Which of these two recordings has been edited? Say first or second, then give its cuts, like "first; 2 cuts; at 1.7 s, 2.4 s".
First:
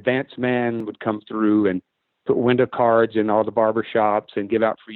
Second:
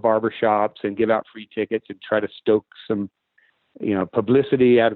first; 1 cut; at 0.9 s